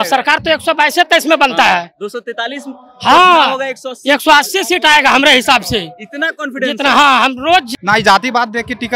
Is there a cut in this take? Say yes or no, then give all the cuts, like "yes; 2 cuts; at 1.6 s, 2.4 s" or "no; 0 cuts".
yes; 1 cut; at 7.7 s